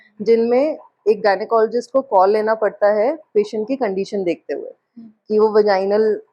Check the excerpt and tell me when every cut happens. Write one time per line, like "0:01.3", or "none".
none